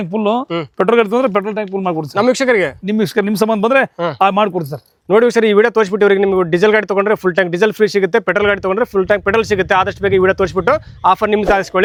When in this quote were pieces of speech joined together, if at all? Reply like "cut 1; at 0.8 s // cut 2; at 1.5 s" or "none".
none